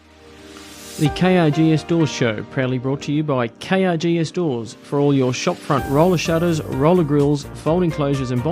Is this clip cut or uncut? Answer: cut